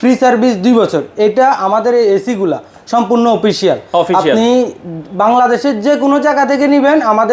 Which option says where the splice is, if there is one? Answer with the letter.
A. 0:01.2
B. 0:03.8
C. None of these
C